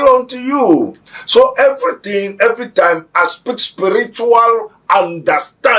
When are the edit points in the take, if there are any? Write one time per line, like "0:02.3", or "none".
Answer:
none